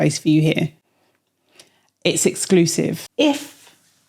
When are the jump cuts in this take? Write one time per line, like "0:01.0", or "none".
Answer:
0:03.0